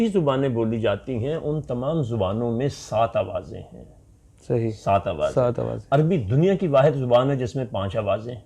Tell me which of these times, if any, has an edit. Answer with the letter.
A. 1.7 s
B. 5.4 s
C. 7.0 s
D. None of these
D